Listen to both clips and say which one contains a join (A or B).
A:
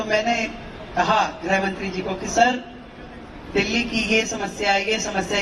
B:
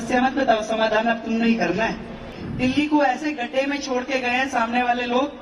B